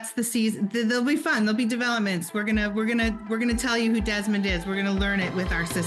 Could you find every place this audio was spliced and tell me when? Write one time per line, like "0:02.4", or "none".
none